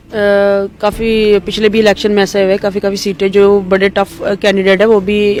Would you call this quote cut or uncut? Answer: uncut